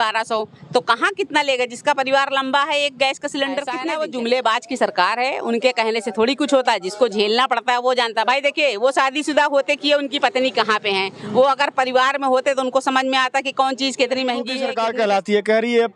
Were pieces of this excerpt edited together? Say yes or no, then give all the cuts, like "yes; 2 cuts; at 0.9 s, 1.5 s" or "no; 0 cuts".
yes; 2 cuts; at 3.8 s, 14.7 s